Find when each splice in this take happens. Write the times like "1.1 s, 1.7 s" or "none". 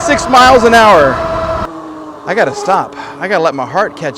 1.7 s